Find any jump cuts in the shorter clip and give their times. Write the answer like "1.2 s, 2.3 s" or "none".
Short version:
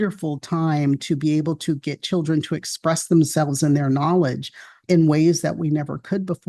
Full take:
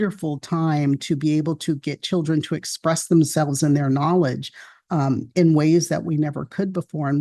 4.8 s